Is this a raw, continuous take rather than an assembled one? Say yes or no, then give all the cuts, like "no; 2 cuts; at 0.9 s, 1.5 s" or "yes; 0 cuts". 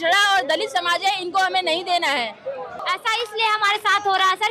no; 1 cut; at 2.7 s